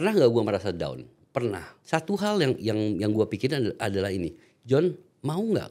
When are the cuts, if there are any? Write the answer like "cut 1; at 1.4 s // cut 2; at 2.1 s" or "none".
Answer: cut 1; at 1.7 s

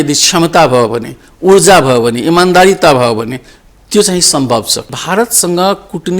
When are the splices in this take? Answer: cut 1; at 4.9 s

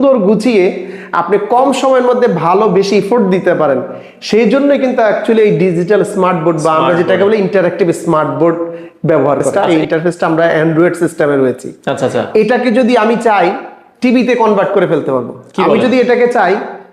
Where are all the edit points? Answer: cut 1; at 9.5 s

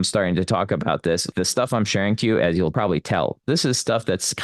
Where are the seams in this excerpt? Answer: cut 1; at 1.3 s // cut 2; at 2.7 s

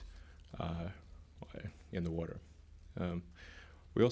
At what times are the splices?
cut 1; at 1.1 s

